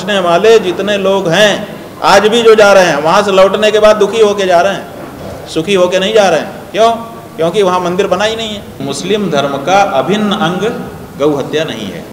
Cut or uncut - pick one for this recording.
cut